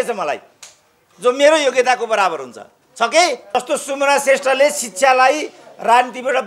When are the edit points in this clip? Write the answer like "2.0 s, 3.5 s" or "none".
none